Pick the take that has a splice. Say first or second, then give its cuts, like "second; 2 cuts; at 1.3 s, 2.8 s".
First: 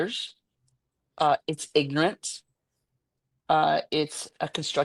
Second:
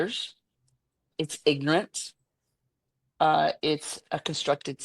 second; 1 cut; at 1.1 s